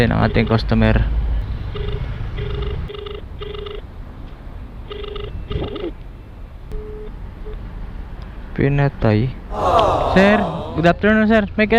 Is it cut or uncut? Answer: cut